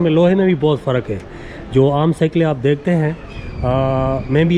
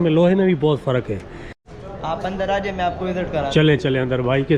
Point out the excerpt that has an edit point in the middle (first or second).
second